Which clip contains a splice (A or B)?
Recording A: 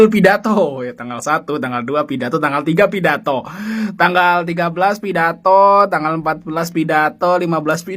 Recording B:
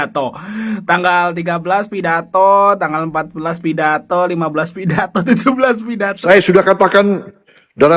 B